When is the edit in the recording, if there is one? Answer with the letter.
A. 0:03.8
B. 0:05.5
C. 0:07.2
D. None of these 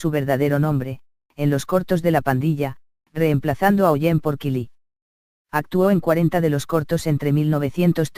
A